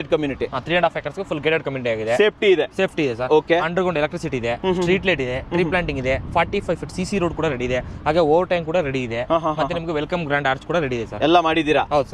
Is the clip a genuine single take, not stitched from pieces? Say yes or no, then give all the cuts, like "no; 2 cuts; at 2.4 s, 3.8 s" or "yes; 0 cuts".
yes; 0 cuts